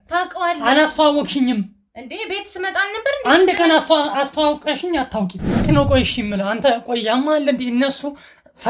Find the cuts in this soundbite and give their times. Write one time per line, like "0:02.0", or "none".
0:05.7